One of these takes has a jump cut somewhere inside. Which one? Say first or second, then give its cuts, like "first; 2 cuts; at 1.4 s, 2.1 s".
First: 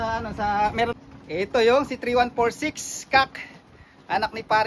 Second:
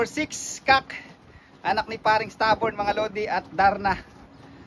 first; 1 cut; at 0.9 s